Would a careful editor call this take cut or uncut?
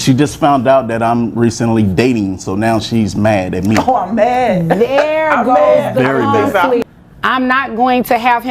cut